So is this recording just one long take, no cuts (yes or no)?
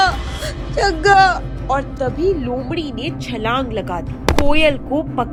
yes